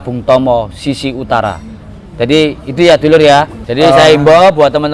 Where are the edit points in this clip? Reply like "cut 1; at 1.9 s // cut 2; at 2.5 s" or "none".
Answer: cut 1; at 3.6 s